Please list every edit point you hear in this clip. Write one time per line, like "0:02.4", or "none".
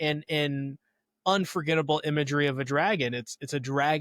none